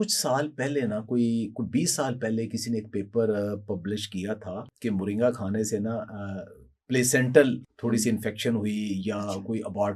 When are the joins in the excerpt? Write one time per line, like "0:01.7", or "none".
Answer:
0:04.7
0:07.7